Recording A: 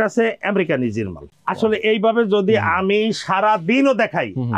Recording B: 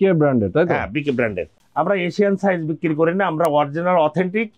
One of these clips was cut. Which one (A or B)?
B